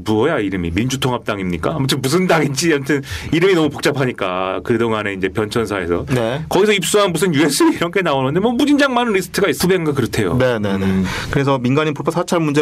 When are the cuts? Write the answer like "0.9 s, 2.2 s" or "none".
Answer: none